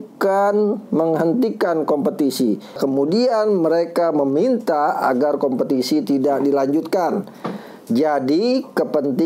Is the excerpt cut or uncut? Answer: cut